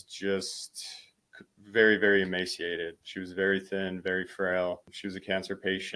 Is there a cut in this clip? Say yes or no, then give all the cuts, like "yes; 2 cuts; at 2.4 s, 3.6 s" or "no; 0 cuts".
yes; 2 cuts; at 3.0 s, 4.9 s